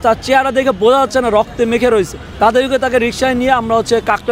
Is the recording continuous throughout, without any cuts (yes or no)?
no